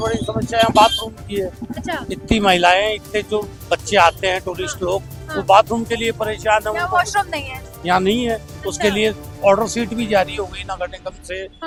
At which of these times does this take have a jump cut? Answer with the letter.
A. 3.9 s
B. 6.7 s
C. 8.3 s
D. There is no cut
D